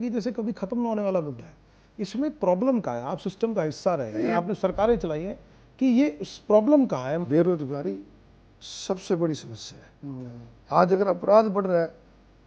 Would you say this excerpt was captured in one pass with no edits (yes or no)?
no